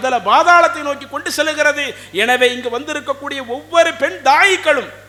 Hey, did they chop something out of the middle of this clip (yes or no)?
no